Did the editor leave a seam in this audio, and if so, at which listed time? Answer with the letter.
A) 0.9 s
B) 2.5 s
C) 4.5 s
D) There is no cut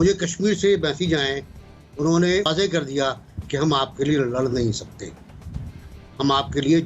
B